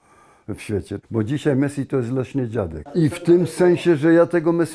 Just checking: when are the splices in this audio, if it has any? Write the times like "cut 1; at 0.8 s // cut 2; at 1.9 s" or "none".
cut 1; at 0.9 s // cut 2; at 2.8 s